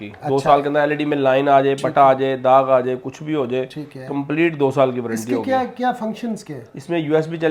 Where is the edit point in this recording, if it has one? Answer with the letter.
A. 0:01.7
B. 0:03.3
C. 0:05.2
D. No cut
D